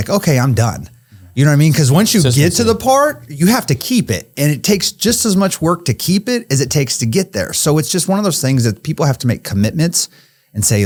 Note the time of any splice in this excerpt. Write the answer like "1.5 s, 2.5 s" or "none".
none

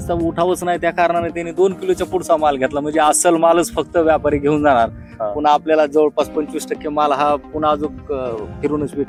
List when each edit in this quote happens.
none

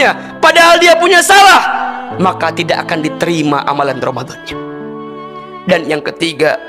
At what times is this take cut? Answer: none

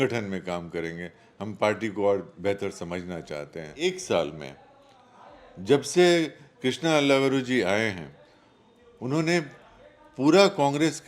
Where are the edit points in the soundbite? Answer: 3.7 s

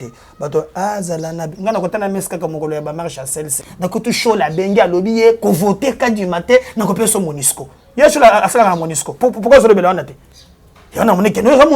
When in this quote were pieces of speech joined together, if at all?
3.6 s

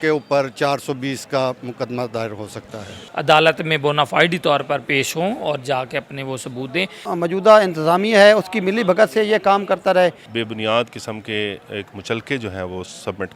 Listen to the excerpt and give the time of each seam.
2.9 s, 7.1 s, 10.3 s

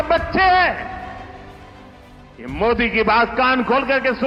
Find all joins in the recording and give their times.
none

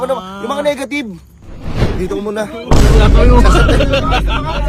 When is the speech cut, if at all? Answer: none

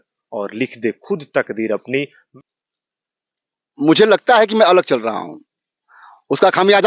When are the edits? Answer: 2.2 s

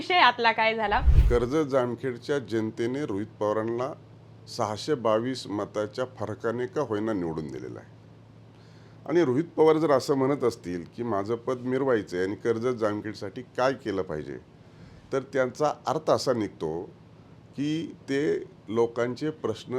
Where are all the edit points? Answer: 1.1 s

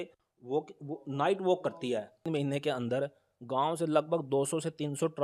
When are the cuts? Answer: 2.3 s

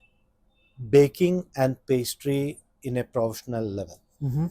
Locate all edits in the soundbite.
none

